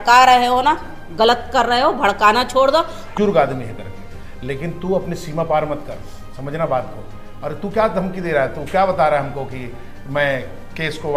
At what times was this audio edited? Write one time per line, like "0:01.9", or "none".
0:03.0